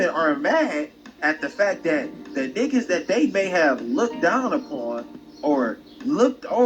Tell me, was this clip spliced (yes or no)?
yes